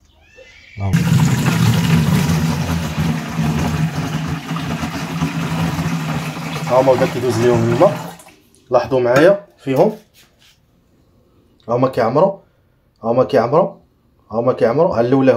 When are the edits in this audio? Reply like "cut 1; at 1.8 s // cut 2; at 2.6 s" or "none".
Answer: cut 1; at 0.9 s